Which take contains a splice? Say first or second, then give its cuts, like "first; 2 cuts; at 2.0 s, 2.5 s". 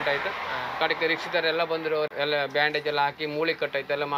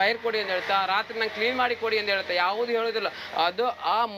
first; 1 cut; at 2.1 s